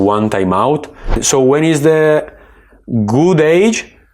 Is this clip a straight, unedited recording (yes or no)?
no